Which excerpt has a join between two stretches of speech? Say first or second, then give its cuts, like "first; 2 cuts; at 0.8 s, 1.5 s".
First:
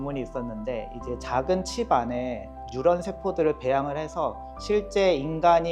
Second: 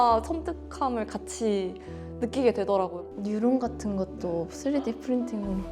second; 1 cut; at 3.1 s